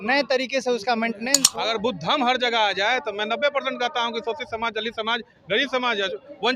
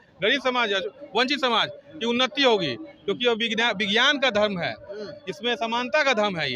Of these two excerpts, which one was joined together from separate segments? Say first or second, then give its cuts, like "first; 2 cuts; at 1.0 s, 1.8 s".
first; 1 cut; at 1.4 s